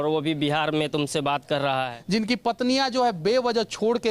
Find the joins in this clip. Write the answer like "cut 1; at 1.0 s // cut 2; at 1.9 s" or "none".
cut 1; at 1.9 s